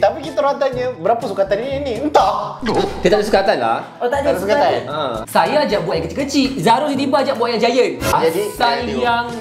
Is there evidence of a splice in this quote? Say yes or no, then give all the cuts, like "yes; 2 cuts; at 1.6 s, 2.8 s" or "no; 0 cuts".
yes; 2 cuts; at 5.2 s, 8.1 s